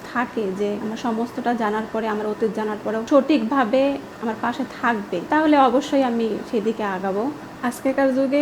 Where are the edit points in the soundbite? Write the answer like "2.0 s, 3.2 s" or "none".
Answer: 0.8 s, 3.0 s, 5.2 s, 7.5 s

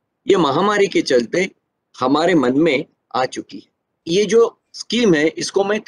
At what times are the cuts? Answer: 4.0 s

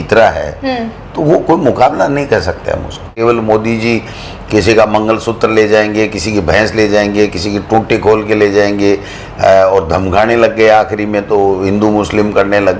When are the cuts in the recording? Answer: 3.1 s

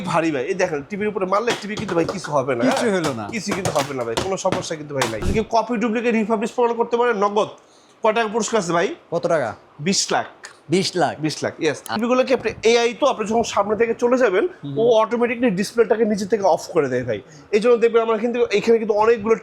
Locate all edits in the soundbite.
5.3 s, 11.9 s

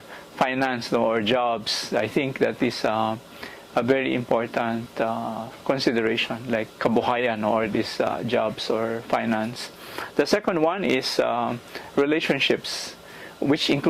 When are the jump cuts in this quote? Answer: 11.3 s

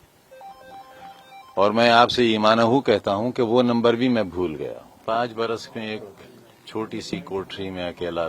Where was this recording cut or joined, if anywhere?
5.0 s

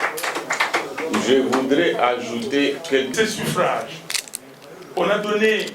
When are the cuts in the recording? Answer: 3.1 s

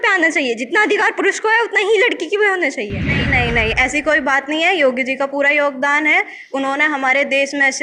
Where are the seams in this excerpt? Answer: 3.1 s

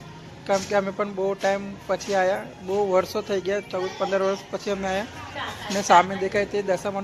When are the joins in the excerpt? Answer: none

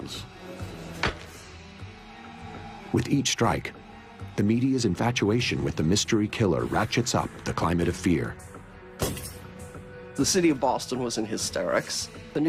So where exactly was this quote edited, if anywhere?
none

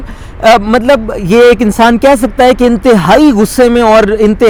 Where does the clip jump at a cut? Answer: none

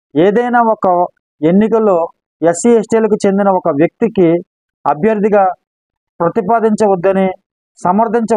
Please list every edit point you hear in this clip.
none

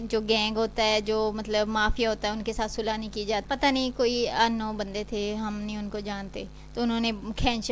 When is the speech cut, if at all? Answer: 3.4 s

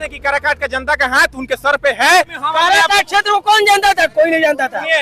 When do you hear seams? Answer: 2.4 s

